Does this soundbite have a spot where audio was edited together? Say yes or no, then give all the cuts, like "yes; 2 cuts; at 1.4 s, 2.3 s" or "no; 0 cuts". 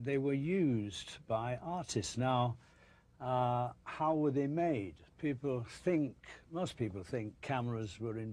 yes; 1 cut; at 1.2 s